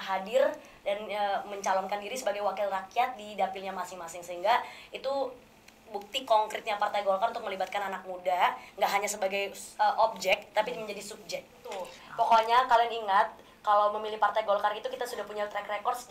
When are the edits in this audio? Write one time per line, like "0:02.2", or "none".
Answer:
0:12.0